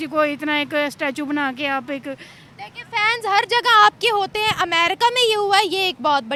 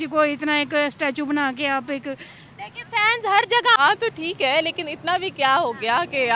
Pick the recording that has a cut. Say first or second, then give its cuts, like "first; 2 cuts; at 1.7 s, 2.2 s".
second; 1 cut; at 3.7 s